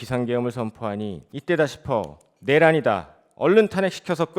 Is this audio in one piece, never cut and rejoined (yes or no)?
no